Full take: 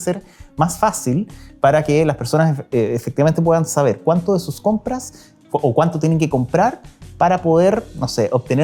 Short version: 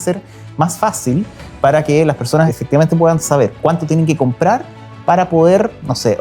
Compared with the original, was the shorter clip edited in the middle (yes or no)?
yes